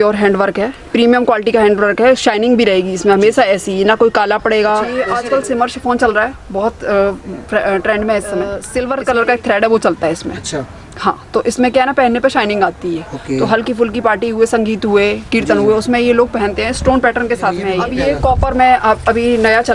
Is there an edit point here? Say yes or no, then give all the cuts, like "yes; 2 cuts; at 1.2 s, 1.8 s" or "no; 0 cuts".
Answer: yes; 3 cuts; at 4.9 s, 8.6 s, 17.9 s